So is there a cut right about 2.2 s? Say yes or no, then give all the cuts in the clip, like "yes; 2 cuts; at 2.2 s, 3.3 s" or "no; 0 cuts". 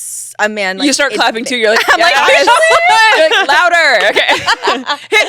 no; 0 cuts